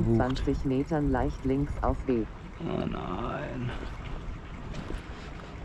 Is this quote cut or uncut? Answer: uncut